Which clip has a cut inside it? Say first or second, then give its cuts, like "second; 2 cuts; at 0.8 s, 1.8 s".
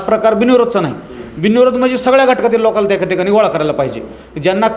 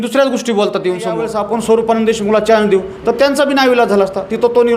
second; 1 cut; at 1.3 s